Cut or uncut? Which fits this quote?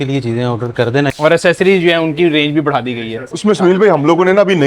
cut